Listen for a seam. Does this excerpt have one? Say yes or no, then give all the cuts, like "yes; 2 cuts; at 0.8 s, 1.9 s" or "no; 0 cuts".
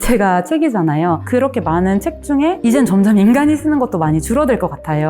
yes; 1 cut; at 1.2 s